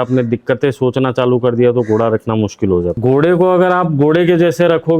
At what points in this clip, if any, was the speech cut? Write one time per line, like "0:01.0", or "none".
0:03.0